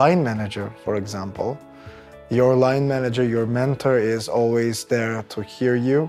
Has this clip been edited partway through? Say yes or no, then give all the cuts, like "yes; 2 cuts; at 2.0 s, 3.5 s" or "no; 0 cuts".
no; 0 cuts